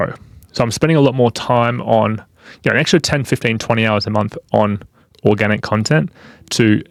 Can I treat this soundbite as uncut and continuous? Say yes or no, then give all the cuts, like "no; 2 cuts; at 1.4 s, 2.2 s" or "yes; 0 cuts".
yes; 0 cuts